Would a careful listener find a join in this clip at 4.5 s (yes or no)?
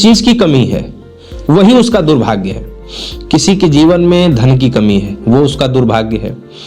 no